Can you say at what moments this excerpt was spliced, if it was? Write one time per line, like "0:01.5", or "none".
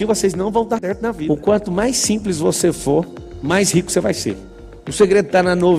0:01.4
0:04.5